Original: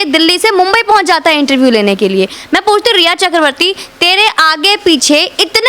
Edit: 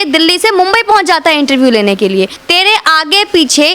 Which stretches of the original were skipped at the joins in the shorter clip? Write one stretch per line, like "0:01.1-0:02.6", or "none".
0:02.4-0:03.9